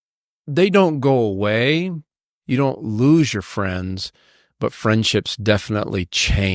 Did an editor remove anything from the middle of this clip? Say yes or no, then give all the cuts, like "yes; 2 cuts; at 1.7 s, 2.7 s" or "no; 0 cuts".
no; 0 cuts